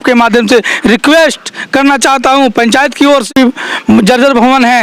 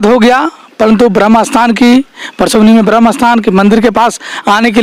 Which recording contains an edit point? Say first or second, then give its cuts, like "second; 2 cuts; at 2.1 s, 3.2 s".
first; 1 cut; at 3.3 s